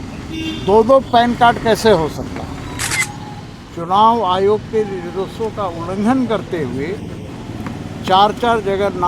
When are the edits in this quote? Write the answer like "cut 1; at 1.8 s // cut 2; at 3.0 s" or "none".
cut 1; at 2.9 s